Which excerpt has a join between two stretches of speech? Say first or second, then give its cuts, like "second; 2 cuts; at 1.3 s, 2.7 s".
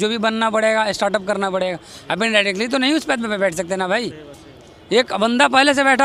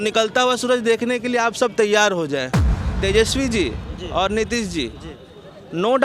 second; 1 cut; at 2.9 s